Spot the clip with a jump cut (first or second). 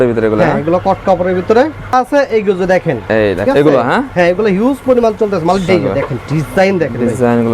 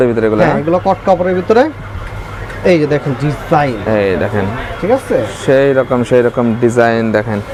first